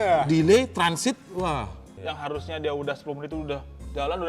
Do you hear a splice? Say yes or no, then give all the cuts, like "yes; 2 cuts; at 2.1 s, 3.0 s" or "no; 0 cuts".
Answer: yes; 1 cut; at 2.0 s